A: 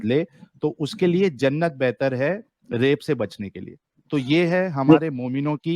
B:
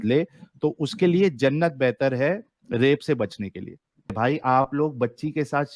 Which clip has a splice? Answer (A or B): B